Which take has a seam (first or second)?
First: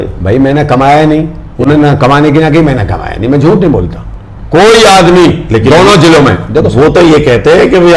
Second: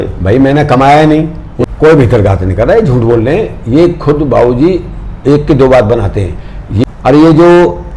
second